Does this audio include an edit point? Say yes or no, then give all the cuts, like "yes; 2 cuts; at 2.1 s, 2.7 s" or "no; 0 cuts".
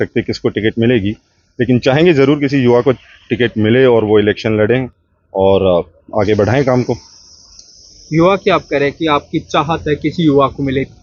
no; 0 cuts